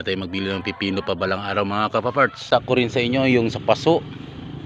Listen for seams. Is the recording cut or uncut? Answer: cut